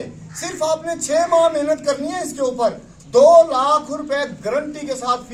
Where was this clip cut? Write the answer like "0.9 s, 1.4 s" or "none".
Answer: none